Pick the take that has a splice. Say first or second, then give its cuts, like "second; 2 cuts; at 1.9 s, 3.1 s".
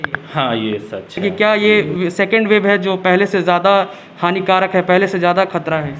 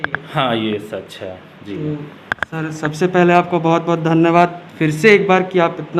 first; 1 cut; at 1.2 s